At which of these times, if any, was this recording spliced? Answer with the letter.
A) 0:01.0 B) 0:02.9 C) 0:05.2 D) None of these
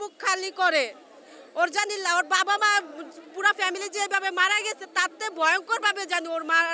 D